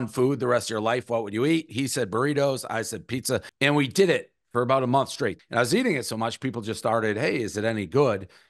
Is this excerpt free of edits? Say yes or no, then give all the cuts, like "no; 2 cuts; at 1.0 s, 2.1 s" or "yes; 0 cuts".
no; 2 cuts; at 3.5 s, 5.4 s